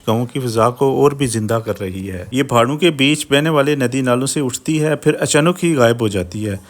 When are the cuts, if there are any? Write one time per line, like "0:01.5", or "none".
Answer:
0:02.3